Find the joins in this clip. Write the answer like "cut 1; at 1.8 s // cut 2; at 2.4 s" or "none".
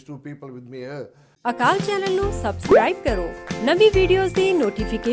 cut 1; at 1.2 s